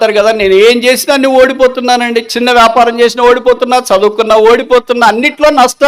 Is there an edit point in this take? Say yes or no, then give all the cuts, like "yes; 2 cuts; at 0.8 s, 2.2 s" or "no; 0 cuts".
no; 0 cuts